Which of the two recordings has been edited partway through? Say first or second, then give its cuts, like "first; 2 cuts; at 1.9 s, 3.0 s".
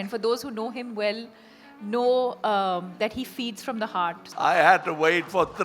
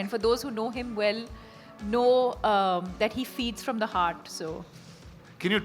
first; 1 cut; at 4.2 s